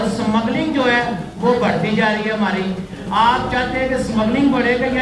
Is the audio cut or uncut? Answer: uncut